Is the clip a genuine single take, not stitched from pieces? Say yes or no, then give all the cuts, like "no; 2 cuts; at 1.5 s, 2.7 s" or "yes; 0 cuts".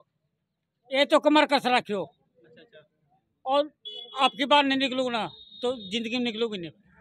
yes; 0 cuts